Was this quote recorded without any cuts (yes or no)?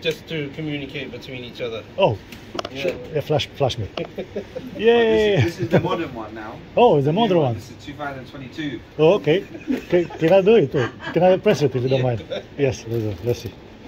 yes